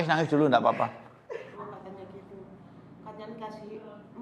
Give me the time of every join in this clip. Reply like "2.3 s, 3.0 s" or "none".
1.5 s